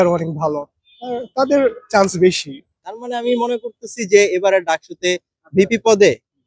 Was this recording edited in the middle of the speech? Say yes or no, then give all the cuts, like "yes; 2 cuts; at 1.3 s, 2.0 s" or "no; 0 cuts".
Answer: yes; 1 cut; at 2.8 s